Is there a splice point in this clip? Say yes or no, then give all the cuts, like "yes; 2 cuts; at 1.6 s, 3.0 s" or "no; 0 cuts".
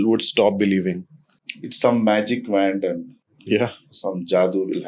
no; 0 cuts